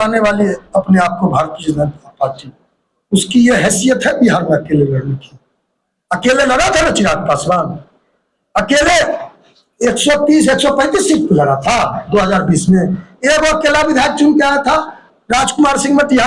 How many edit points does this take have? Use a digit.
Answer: 0